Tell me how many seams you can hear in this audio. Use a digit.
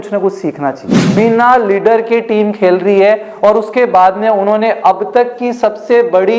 1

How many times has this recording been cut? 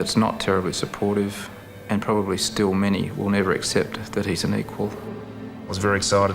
1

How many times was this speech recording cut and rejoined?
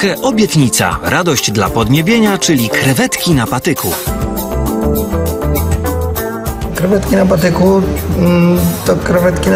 0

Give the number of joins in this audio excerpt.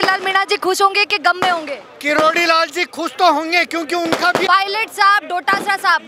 1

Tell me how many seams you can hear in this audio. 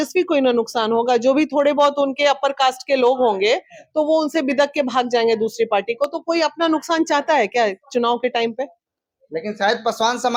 0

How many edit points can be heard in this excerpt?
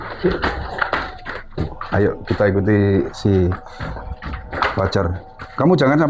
0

